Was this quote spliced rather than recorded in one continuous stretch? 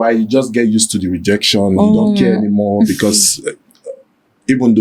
no; 0 cuts

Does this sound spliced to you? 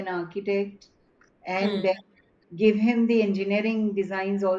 no; 0 cuts

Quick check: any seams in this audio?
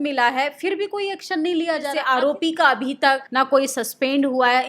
yes; 2 cuts; at 2.0 s, 3.3 s

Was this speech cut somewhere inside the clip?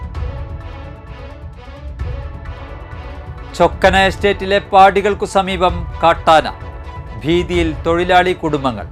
yes; 2 cuts; at 2.7 s, 3.5 s

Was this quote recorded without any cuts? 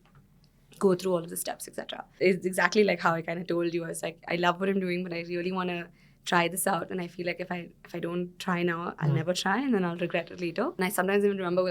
no; 2 cuts; at 2.1 s, 10.8 s

